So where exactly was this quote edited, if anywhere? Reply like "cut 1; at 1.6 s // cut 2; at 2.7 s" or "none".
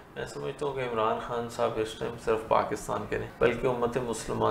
cut 1; at 3.3 s